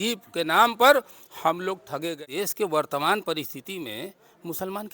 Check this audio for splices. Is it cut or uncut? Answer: cut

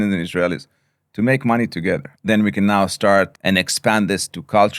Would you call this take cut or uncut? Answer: cut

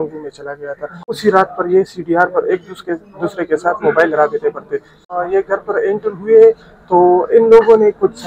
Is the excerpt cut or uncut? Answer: cut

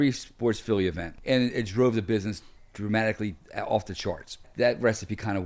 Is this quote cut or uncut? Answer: cut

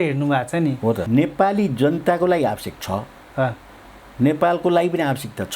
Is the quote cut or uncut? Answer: cut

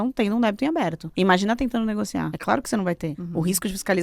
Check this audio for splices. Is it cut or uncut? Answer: cut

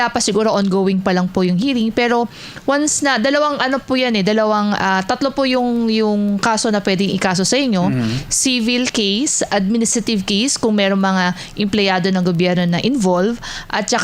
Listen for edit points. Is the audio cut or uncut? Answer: uncut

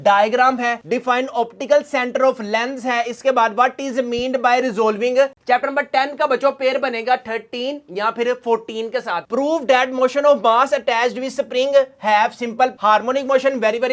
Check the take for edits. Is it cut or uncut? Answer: cut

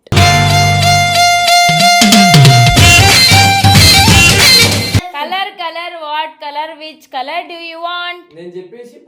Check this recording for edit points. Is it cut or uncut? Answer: cut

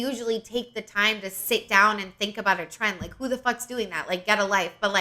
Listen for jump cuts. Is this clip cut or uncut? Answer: uncut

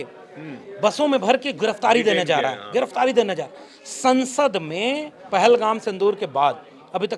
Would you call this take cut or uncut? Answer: uncut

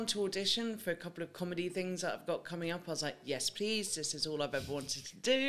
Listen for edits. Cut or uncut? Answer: uncut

